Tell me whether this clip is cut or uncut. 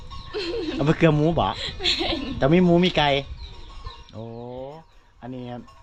uncut